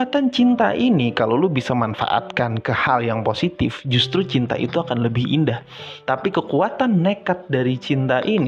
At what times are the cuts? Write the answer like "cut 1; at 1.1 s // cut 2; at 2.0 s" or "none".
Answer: none